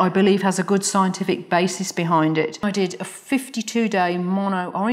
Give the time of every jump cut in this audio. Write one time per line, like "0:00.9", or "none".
0:02.6